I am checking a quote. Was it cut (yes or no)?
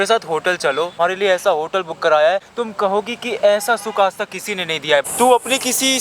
yes